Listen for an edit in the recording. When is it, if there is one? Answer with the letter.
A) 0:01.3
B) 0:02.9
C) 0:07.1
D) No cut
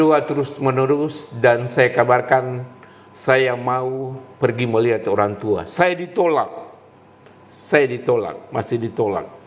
D